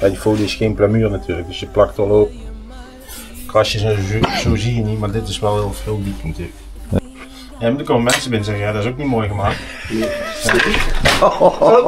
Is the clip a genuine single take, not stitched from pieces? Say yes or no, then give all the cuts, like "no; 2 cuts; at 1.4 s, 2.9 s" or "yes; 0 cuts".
no; 1 cut; at 7.0 s